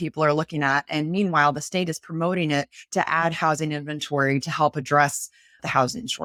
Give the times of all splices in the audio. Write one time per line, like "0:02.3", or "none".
none